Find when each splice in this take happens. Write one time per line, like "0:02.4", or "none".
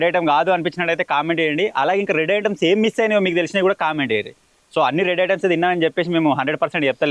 none